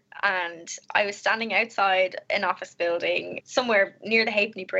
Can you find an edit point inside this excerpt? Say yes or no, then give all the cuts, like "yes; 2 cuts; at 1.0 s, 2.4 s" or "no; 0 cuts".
yes; 1 cut; at 3.4 s